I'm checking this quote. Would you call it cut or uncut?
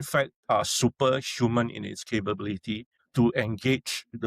cut